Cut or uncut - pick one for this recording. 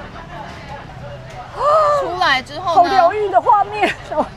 cut